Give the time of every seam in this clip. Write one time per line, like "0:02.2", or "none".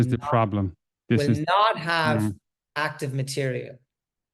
none

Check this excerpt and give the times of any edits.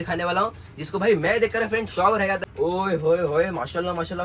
0:02.5

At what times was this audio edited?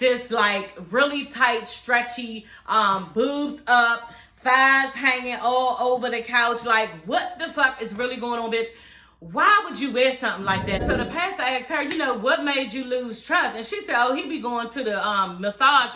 0:10.8

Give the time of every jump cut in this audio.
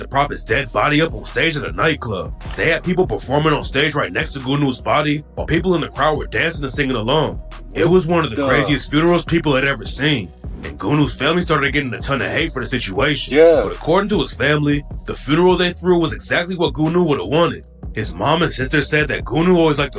none

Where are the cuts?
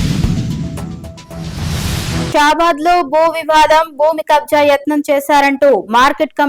0:02.3

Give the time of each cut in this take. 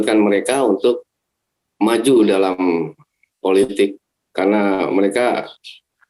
none

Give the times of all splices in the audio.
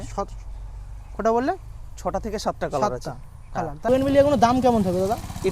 0:03.9

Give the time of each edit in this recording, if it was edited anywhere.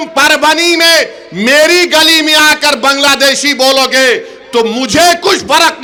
none

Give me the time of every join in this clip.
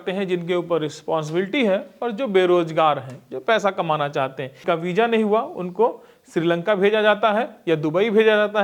0:04.5

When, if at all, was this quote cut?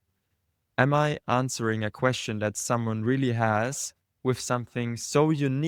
none

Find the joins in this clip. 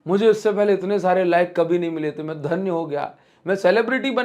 none

